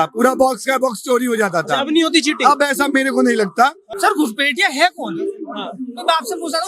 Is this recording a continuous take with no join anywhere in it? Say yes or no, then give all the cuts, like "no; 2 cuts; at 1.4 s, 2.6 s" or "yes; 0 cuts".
no; 1 cut; at 3.9 s